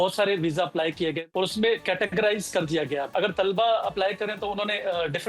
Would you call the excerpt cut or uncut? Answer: cut